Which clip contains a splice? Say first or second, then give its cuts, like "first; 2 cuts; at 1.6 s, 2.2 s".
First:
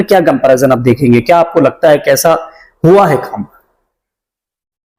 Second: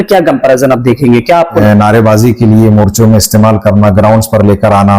second; 1 cut; at 1.6 s